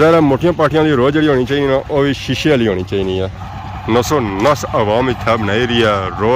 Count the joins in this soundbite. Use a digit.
1